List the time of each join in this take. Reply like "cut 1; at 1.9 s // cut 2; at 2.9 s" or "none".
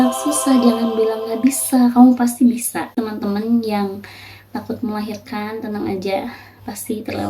cut 1; at 3.0 s